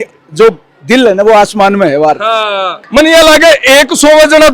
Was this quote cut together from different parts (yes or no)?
yes